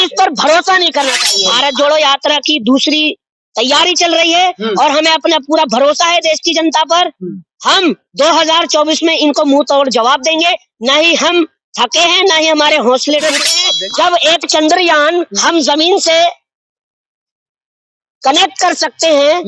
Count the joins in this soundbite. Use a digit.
2